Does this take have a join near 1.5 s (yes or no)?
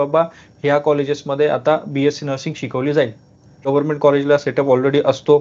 no